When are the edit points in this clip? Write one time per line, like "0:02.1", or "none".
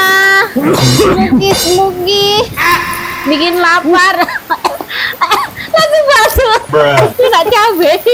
none